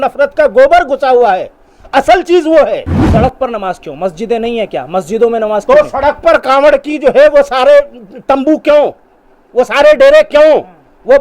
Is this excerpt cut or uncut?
cut